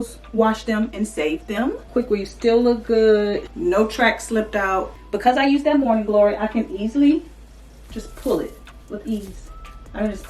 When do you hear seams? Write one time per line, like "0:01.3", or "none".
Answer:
0:01.8
0:03.5
0:04.9
0:08.7